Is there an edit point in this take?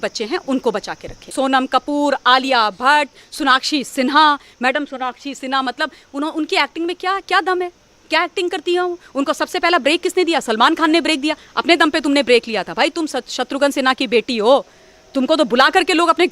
yes; 1 cut; at 1.3 s

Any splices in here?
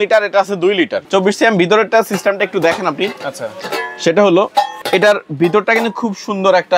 yes; 2 cuts; at 1.0 s, 4.7 s

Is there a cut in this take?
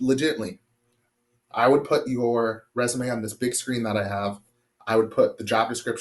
no; 0 cuts

